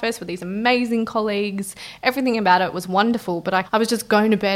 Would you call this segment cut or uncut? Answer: cut